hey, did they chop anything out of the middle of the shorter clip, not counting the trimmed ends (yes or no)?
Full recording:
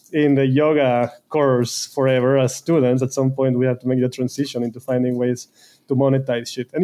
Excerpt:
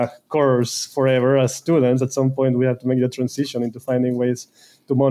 no